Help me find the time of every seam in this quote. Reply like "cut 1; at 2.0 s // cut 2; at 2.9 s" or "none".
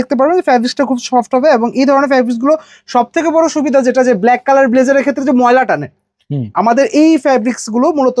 none